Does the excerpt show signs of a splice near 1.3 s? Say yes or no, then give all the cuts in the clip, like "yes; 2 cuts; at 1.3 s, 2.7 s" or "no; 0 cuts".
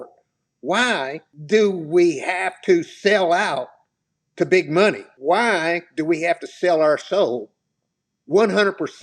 yes; 2 cuts; at 1.3 s, 5.1 s